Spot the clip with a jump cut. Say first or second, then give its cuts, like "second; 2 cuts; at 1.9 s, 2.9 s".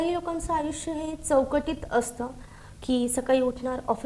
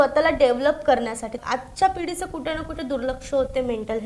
second; 1 cut; at 1.4 s